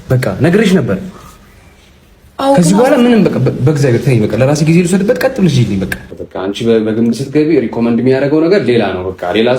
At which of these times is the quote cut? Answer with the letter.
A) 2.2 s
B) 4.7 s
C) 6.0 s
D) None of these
C